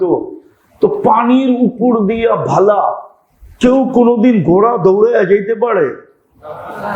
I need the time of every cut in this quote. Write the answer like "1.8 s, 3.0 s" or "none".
none